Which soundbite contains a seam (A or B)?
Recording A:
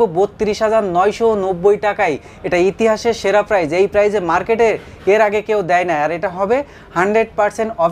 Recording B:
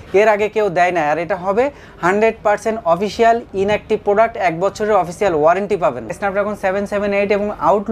B